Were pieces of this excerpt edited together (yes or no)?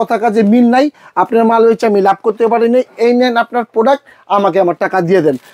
no